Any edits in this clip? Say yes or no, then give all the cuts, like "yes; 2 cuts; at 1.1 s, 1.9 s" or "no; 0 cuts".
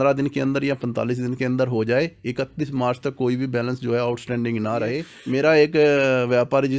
yes; 1 cut; at 5.1 s